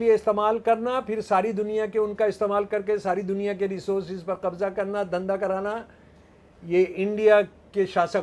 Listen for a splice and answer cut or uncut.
uncut